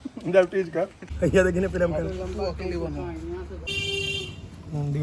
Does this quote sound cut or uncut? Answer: cut